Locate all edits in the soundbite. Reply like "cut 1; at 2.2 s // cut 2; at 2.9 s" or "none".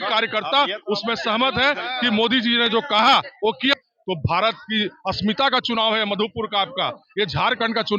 cut 1; at 3.7 s